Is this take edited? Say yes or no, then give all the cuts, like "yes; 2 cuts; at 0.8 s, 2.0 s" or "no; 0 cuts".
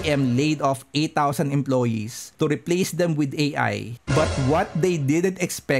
yes; 1 cut; at 3.9 s